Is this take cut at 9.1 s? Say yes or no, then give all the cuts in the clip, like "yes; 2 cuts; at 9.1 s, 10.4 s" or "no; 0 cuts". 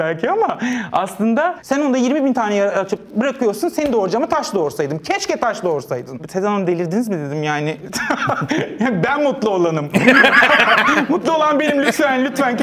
no; 2 cuts; at 1.6 s, 6.2 s